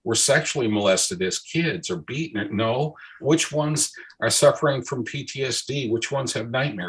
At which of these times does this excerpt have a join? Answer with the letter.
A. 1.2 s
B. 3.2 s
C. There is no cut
B